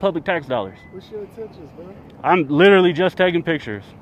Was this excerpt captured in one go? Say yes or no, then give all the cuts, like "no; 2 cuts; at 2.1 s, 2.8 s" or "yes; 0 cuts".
yes; 0 cuts